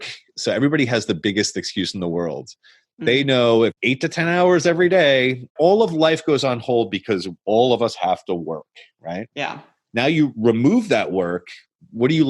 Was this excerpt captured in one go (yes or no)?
no